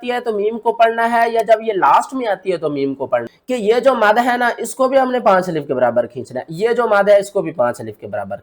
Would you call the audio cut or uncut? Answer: cut